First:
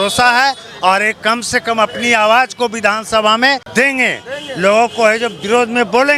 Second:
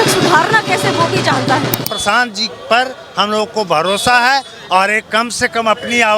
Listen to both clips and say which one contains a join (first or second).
second